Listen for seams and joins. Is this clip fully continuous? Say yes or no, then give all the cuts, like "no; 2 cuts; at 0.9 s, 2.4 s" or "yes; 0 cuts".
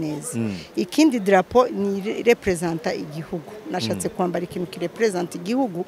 yes; 0 cuts